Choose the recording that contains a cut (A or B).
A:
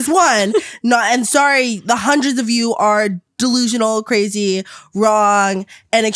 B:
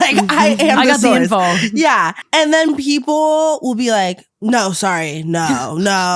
B